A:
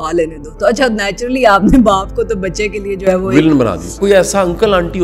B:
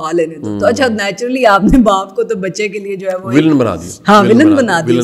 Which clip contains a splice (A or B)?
A